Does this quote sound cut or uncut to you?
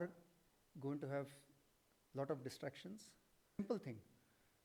cut